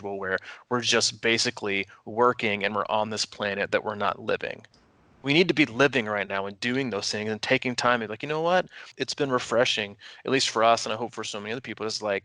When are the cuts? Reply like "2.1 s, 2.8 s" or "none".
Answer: 8.9 s